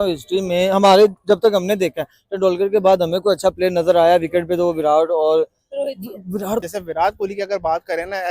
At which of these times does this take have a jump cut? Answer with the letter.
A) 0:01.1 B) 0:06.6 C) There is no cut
B